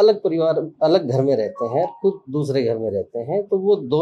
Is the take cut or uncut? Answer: uncut